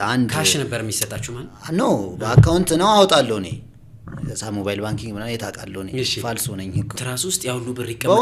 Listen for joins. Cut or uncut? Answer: cut